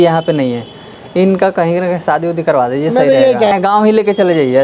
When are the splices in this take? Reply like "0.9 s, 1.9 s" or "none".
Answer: 3.5 s